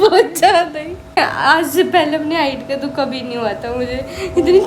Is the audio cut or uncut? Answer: cut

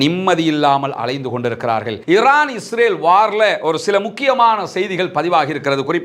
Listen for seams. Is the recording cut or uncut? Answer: cut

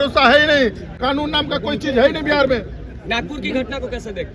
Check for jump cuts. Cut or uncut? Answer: uncut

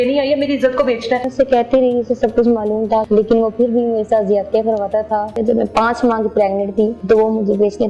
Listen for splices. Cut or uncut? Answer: cut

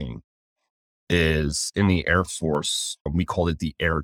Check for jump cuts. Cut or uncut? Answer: uncut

